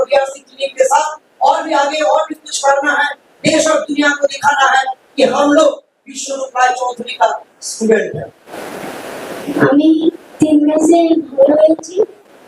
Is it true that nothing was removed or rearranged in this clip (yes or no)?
no